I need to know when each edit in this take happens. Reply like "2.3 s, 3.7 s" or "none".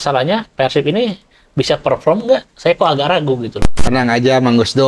3.6 s